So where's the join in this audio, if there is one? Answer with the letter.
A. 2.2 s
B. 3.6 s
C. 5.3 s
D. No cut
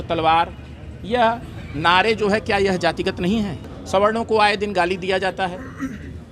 B